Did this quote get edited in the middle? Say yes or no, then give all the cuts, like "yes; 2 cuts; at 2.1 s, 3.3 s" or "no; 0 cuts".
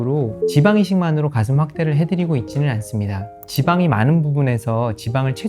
yes; 1 cut; at 3.4 s